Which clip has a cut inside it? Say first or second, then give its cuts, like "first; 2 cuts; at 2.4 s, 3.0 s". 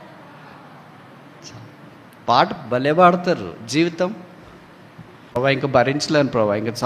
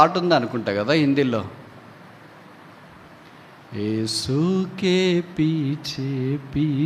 first; 1 cut; at 5.3 s